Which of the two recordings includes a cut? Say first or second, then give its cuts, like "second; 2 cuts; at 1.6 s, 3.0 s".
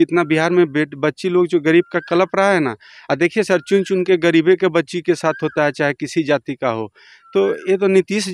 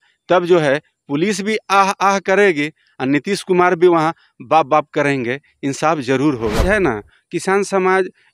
second; 1 cut; at 6.6 s